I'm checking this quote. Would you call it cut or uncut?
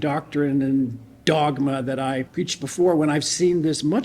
cut